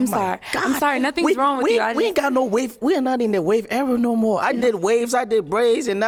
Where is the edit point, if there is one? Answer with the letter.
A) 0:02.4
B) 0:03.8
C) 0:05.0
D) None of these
D